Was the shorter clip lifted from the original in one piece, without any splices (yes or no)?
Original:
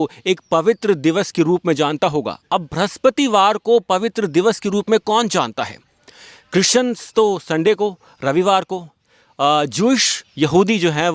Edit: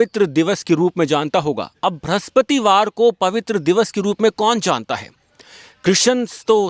yes